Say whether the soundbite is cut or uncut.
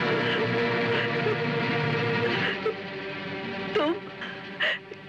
uncut